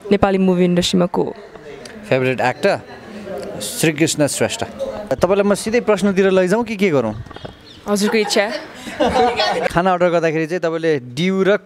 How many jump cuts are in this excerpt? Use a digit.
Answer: 2